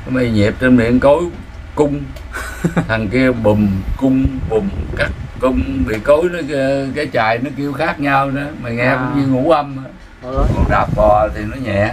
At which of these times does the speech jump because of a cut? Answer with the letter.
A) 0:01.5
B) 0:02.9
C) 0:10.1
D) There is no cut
C